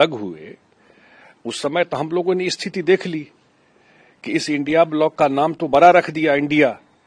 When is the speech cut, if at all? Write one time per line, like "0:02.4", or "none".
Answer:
none